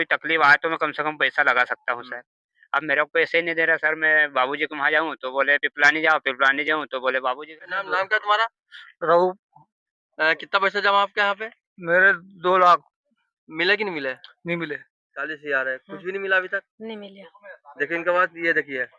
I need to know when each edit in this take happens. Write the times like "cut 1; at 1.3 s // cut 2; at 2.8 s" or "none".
cut 1; at 7.5 s // cut 2; at 14.9 s